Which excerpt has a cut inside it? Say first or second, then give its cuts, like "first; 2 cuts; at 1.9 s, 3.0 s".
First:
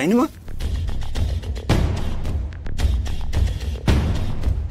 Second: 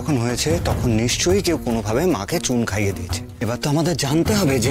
second; 1 cut; at 3.2 s